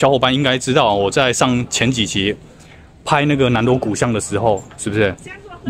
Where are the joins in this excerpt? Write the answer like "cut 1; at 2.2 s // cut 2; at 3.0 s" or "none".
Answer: none